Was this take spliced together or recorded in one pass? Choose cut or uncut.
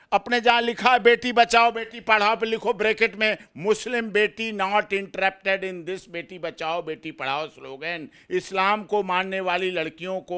uncut